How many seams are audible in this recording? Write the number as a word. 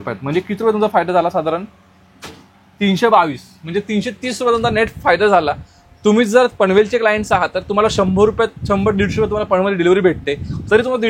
zero